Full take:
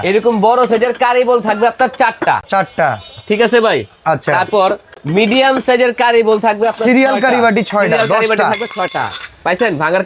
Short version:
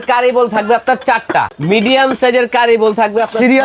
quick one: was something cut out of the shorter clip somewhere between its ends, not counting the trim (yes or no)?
yes